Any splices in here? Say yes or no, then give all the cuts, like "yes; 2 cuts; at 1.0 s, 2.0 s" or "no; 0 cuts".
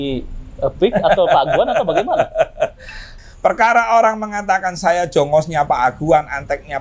yes; 1 cut; at 3.1 s